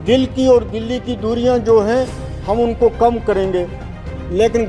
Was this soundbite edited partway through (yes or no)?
no